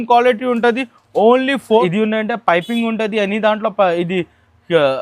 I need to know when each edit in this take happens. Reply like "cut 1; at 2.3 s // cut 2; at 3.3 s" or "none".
cut 1; at 1.8 s